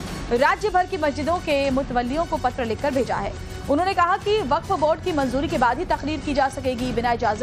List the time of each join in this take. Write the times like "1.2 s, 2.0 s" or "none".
none